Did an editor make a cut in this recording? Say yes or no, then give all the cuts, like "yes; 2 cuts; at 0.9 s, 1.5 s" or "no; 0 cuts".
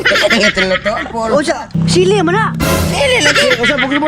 yes; 1 cut; at 1.7 s